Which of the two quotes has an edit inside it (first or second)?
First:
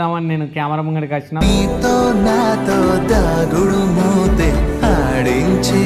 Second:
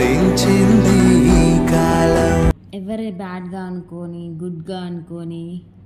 second